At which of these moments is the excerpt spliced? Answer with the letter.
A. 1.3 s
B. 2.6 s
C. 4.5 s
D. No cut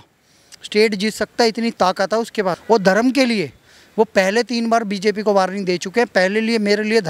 B